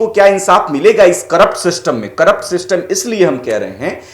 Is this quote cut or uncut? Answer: uncut